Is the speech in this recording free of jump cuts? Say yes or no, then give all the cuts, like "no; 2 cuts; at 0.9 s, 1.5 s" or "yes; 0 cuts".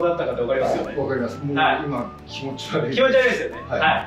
yes; 0 cuts